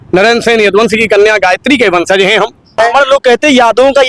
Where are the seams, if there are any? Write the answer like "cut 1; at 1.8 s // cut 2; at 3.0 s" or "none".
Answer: cut 1; at 2.8 s